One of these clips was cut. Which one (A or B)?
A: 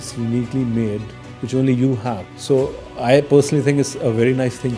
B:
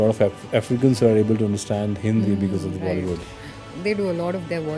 A